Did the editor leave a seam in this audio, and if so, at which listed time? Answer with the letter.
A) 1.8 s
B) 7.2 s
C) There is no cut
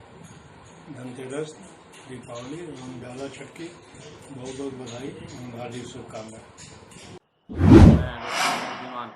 B